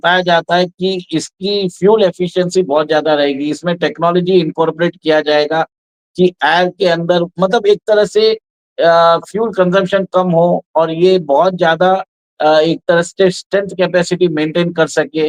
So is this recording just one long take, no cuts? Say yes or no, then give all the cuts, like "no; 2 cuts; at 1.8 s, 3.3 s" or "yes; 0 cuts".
yes; 0 cuts